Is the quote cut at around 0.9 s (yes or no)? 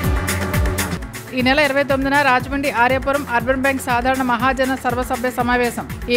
yes